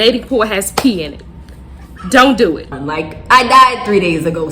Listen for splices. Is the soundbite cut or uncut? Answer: cut